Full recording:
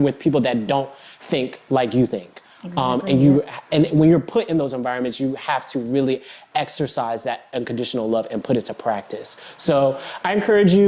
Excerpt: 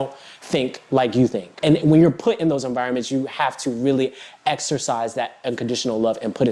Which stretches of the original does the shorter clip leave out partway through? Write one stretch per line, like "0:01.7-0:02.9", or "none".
0:02.3-0:03.6